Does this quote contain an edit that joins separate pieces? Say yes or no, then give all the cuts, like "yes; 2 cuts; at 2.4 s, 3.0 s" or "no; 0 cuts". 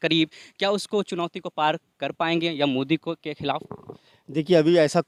no; 0 cuts